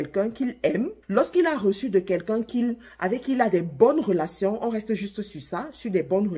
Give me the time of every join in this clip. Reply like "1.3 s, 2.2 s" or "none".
1.0 s

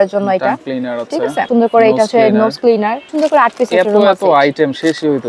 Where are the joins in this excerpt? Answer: 1.5 s, 3.1 s

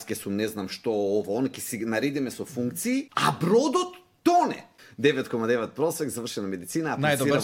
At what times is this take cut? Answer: 3.1 s, 4.8 s

